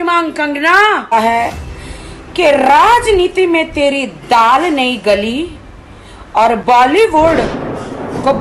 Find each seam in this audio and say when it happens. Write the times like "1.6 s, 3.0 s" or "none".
1.1 s